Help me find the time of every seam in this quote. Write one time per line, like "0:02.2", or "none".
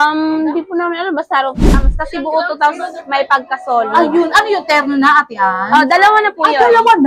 0:01.8